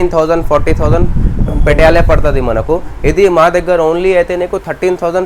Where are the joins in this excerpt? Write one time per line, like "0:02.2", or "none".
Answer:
none